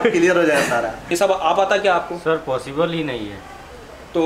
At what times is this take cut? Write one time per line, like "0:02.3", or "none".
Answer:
0:01.1